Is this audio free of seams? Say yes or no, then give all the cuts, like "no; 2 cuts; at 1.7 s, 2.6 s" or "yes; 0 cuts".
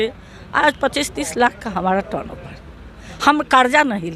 yes; 0 cuts